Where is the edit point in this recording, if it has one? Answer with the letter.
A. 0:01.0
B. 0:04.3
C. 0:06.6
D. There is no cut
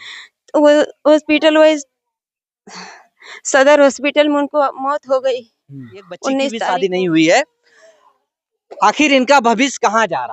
C